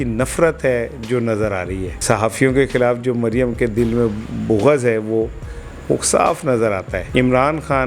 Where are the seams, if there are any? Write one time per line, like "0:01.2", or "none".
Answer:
0:01.9
0:07.0